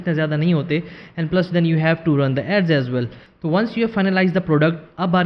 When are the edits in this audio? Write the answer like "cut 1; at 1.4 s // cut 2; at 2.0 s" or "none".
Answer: cut 1; at 3.2 s